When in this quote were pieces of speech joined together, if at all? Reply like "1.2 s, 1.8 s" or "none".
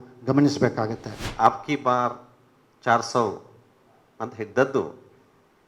1.3 s

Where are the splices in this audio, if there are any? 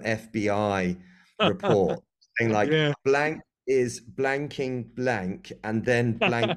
none

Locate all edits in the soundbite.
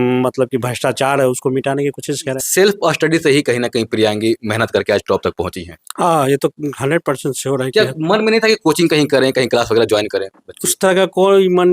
2.4 s

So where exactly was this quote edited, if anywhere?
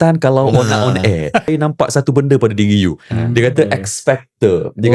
1.5 s

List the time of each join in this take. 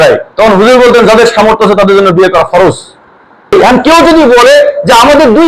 3.5 s

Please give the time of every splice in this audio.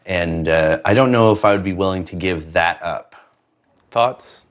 2.9 s

